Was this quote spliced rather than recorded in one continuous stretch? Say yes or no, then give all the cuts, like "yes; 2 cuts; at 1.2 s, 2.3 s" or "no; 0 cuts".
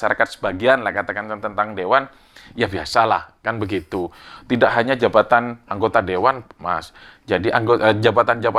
no; 0 cuts